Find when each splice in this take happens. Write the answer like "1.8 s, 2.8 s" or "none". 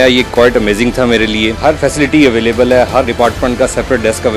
1.6 s, 3.1 s